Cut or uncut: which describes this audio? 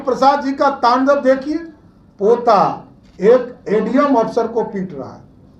uncut